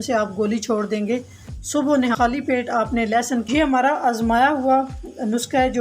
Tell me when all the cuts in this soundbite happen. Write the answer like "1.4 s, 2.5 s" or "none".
2.2 s, 3.5 s

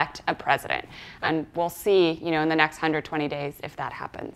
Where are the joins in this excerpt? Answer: 1.2 s

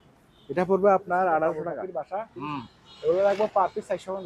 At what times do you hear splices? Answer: 1.7 s

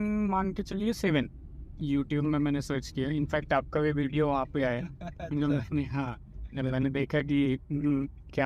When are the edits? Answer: 1.7 s

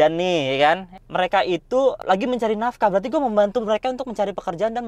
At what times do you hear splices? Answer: 0.9 s

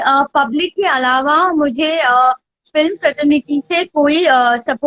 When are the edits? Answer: none

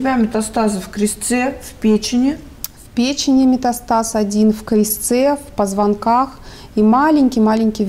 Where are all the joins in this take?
none

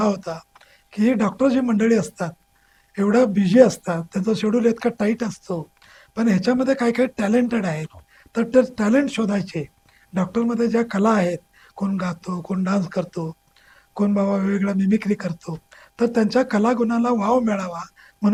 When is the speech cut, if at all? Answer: none

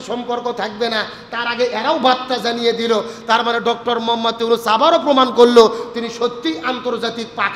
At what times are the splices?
none

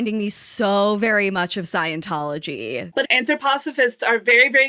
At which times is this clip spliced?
3.0 s

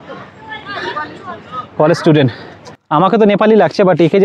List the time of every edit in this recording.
2.7 s

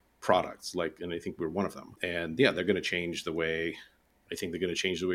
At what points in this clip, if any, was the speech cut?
2.0 s

